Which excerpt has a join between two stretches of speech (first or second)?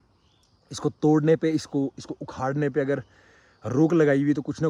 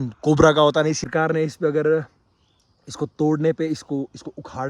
second